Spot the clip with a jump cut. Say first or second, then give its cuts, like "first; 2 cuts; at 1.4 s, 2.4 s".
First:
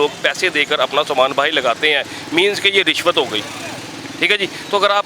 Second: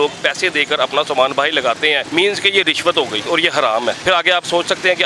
second; 3 cuts; at 2.0 s, 3.2 s, 4.0 s